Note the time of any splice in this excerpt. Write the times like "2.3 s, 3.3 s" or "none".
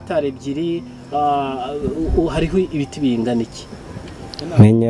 none